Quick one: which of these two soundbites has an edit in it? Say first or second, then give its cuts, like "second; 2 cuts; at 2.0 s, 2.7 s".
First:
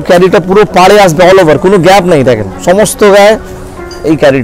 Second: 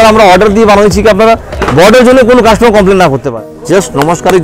second; 1 cut; at 3.3 s